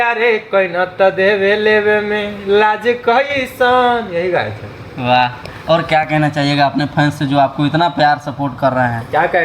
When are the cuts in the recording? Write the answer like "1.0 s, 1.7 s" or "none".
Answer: none